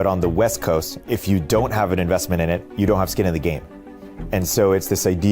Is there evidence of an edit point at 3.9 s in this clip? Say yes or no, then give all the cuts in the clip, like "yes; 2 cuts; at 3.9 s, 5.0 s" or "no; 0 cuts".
yes; 3 cuts; at 0.9 s, 2.7 s, 3.9 s